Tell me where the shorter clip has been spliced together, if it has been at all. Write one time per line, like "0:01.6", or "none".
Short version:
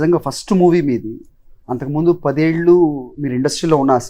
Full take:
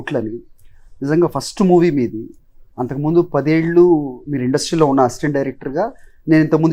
none